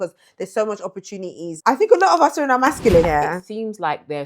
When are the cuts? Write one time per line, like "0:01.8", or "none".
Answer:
0:01.5
0:03.1

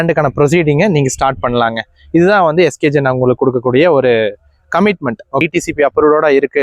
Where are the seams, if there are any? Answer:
0:05.4

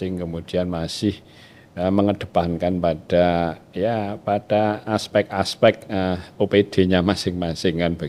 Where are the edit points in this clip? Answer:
none

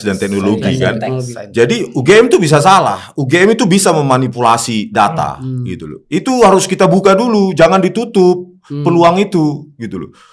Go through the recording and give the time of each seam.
none

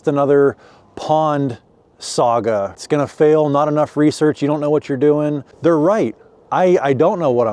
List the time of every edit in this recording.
0:02.8
0:05.5

